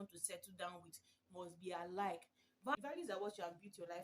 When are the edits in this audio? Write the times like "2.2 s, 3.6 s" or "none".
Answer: 2.8 s